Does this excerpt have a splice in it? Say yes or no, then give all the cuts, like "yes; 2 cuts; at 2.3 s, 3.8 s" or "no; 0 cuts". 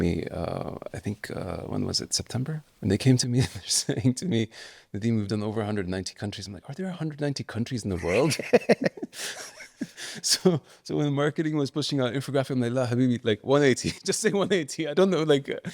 yes; 1 cut; at 2.7 s